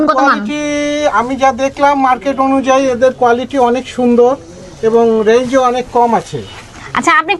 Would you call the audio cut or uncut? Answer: uncut